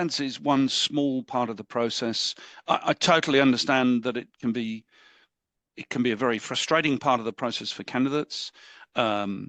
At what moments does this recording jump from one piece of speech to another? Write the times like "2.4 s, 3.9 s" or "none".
none